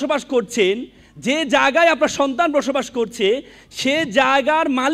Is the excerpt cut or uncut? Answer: uncut